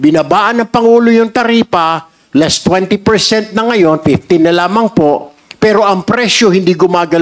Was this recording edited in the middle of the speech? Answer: no; 0 cuts

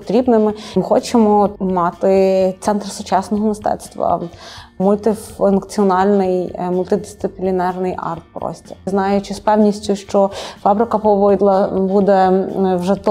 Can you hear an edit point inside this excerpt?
yes; 4 cuts; at 0.7 s, 1.6 s, 4.8 s, 8.9 s

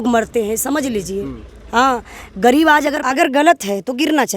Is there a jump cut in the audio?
yes; 1 cut; at 3.0 s

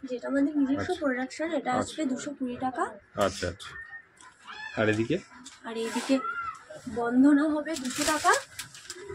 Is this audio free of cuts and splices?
yes; 0 cuts

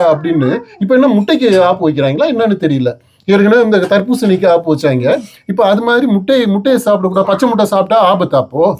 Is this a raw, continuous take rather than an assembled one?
yes; 0 cuts

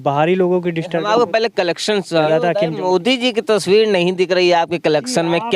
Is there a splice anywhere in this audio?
yes; 1 cut; at 2.3 s

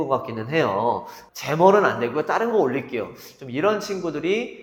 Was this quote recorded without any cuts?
no; 1 cut; at 1.2 s

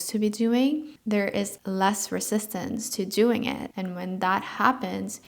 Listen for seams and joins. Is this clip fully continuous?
no; 1 cut; at 3.7 s

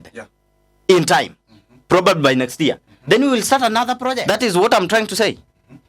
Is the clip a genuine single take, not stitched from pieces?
yes; 0 cuts

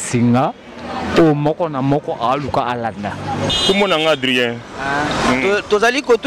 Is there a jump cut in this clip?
yes; 1 cut; at 3.5 s

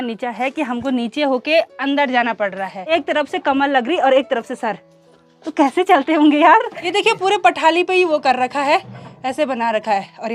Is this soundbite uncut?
no; 2 cuts; at 2.8 s, 6.8 s

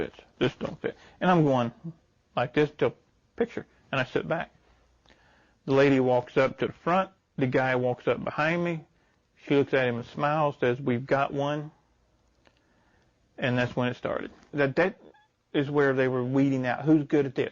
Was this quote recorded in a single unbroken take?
no; 1 cut; at 14.5 s

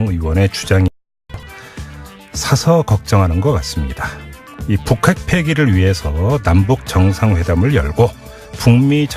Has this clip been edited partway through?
no; 0 cuts

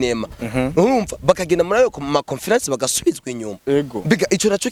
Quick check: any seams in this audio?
no; 0 cuts

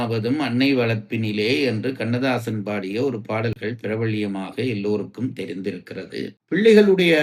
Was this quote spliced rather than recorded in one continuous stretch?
no; 0 cuts

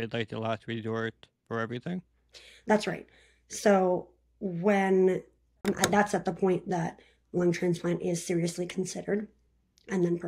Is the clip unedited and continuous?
no; 1 cut; at 5.6 s

